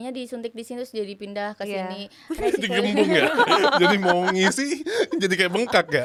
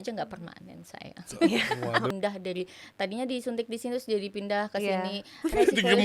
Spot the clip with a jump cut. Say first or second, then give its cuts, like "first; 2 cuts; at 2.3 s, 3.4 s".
second; 1 cut; at 2.1 s